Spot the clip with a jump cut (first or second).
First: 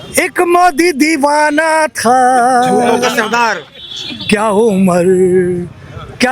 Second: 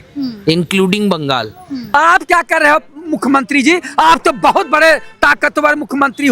second